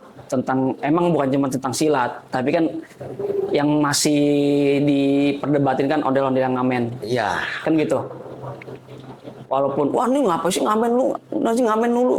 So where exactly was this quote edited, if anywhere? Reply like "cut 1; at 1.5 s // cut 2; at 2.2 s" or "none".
none